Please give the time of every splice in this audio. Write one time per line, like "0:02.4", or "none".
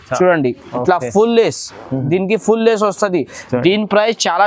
none